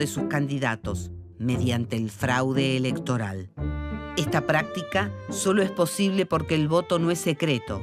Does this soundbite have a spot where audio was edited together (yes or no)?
yes